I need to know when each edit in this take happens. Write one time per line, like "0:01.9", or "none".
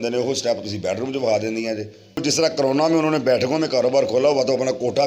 0:02.2